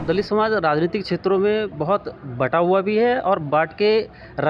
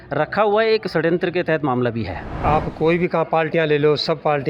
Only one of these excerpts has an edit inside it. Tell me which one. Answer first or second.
second